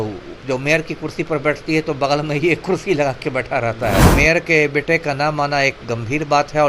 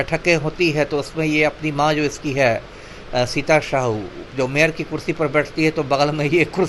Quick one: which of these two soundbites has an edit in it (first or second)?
first